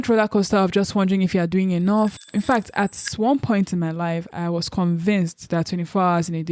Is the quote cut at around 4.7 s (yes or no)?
no